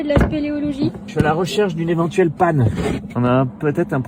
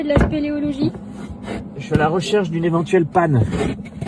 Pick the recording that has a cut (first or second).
first